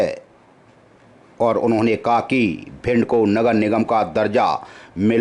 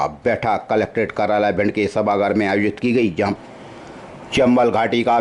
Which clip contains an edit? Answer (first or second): second